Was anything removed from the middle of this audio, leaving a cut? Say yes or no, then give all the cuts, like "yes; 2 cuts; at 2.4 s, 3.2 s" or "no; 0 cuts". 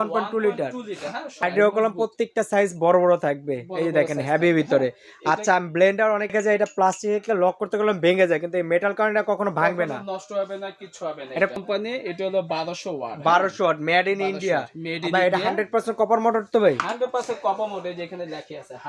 yes; 3 cuts; at 1.4 s, 6.3 s, 11.5 s